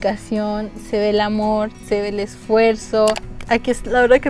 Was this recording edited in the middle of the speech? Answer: yes; 1 cut; at 3.3 s

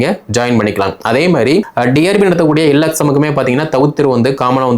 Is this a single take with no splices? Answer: no; 1 cut; at 1.7 s

